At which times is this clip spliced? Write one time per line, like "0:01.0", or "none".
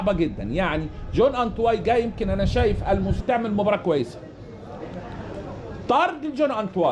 none